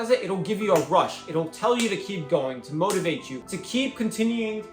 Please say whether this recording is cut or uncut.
uncut